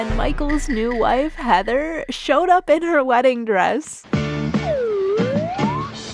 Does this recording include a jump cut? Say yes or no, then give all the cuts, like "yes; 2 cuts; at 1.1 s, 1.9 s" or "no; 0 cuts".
no; 0 cuts